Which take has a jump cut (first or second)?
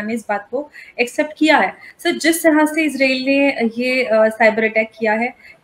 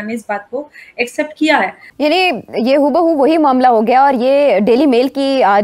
second